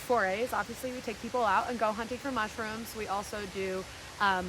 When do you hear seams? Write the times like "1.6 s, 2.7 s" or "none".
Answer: none